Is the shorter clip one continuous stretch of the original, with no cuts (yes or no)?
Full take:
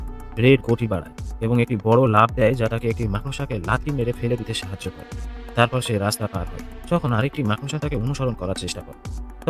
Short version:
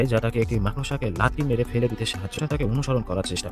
no